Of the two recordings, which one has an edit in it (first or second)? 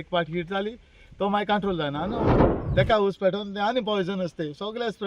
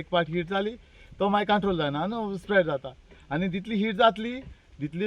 first